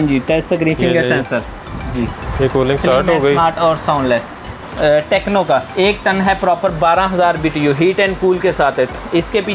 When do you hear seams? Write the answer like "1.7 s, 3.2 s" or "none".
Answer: 4.6 s